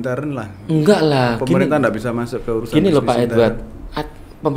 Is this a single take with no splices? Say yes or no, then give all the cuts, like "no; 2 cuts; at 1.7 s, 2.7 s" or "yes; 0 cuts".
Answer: yes; 0 cuts